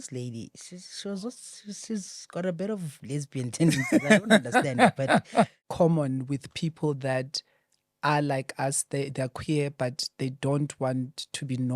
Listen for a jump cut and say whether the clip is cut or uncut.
cut